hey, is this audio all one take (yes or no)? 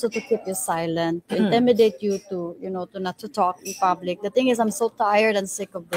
yes